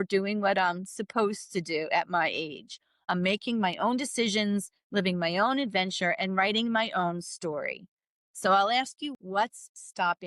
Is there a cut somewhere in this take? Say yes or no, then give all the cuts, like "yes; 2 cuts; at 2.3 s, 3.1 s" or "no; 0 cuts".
yes; 1 cut; at 9.2 s